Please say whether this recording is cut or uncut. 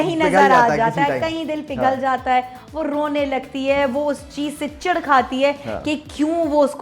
uncut